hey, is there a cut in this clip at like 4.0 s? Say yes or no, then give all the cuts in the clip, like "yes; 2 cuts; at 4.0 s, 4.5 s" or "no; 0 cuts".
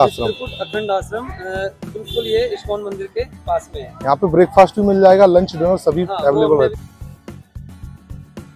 no; 1 cut; at 6.7 s